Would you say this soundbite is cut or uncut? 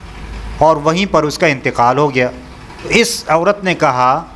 cut